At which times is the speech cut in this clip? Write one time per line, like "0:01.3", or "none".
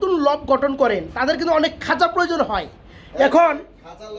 none